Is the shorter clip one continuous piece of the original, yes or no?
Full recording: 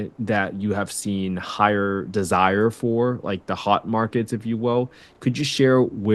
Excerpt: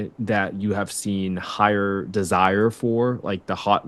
yes